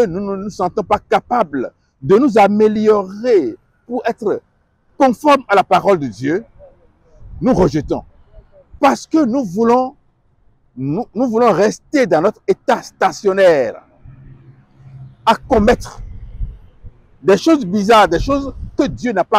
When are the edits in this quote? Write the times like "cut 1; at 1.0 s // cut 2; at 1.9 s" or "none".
cut 1; at 8.8 s